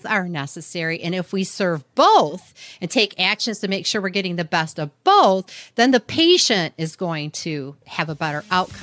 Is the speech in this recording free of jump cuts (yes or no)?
no